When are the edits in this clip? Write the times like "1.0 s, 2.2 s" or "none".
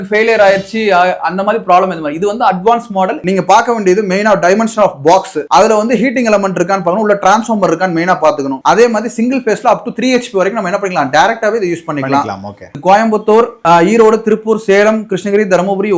3.2 s, 8.6 s, 12.7 s